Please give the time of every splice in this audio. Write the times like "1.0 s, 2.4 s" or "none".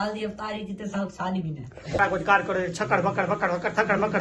2.0 s

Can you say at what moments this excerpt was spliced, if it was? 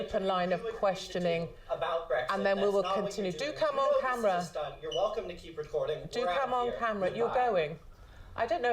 6.8 s

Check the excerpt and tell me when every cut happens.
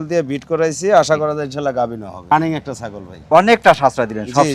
none

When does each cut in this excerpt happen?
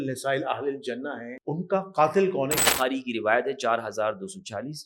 1.3 s, 2.6 s

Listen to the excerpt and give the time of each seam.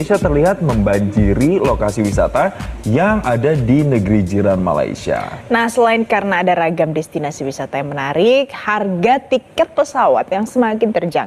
none

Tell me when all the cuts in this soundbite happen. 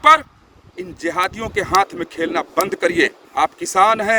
3.2 s

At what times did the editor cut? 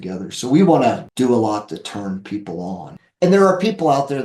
1.0 s, 3.0 s

